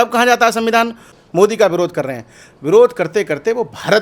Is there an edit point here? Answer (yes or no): yes